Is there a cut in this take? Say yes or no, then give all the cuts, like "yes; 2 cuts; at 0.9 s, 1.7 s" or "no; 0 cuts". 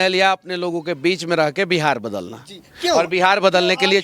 no; 0 cuts